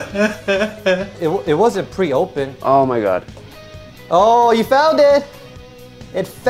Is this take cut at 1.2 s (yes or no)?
yes